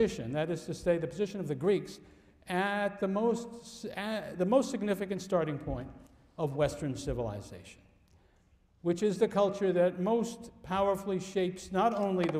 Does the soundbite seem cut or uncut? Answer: uncut